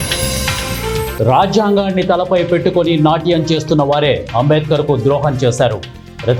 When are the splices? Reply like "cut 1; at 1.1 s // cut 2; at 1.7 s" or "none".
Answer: cut 1; at 1.1 s

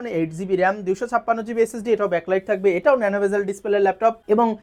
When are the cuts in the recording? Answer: none

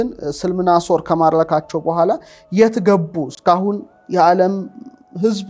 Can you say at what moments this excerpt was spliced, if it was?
none

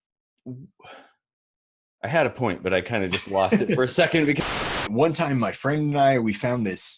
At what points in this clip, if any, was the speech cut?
cut 1; at 4.4 s

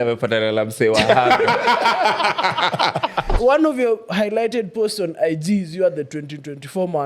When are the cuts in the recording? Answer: cut 1; at 3.3 s

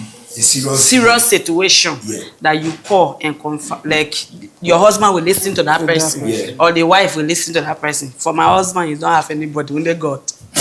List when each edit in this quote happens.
none

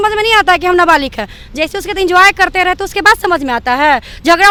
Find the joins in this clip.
none

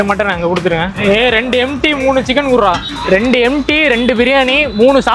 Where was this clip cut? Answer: cut 1; at 0.9 s

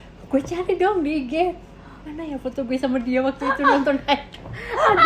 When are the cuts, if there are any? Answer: none

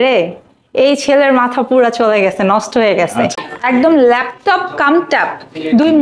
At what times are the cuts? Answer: cut 1; at 3.3 s

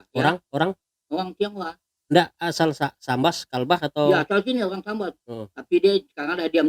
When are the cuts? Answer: none

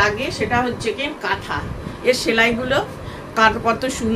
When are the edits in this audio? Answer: cut 1; at 1.8 s

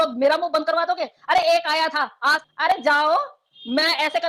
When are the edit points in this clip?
cut 1; at 2.4 s

